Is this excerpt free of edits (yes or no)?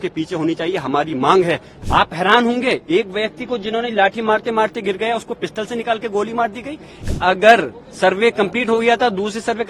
no